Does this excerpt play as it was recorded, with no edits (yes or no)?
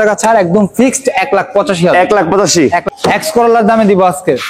no